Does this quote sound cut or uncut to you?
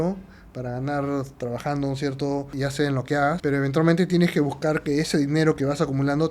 cut